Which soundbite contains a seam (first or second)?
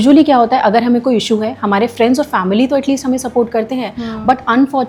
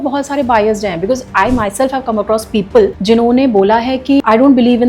second